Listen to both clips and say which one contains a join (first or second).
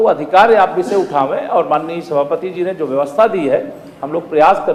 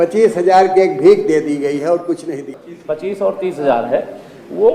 second